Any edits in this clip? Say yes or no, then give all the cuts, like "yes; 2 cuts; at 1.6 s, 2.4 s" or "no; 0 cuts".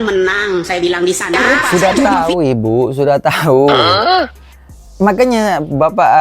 yes; 1 cut; at 1.4 s